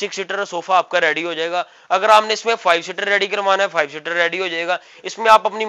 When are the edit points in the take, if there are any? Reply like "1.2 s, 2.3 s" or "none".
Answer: none